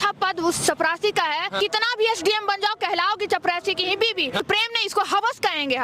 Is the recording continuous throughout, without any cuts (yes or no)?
no